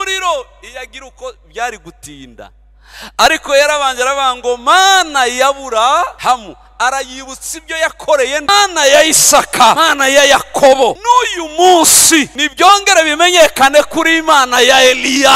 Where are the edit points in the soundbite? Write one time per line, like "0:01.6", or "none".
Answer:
0:06.1
0:08.5
0:09.8
0:11.0
0:12.4